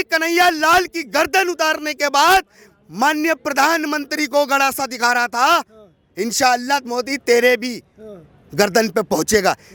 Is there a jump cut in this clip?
no; 0 cuts

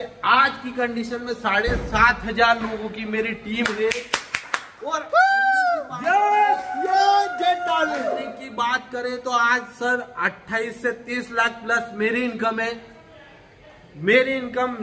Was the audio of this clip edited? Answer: no; 0 cuts

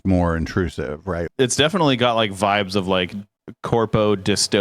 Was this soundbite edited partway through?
yes; 1 cut; at 1.3 s

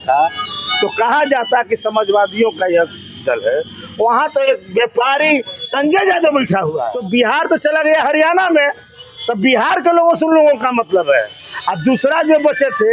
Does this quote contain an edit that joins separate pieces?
yes; 1 cut; at 6.9 s

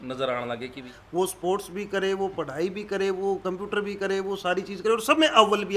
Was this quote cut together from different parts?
yes; 1 cut; at 0.9 s

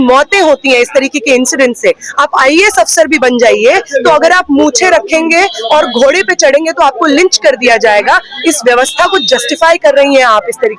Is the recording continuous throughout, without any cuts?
yes; 0 cuts

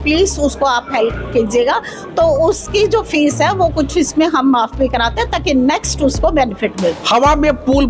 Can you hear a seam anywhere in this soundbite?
yes; 1 cut; at 7.0 s

